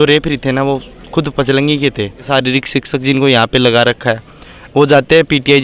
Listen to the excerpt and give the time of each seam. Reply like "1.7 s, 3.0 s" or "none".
2.3 s